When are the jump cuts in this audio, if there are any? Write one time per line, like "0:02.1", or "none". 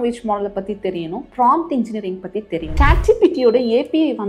0:02.7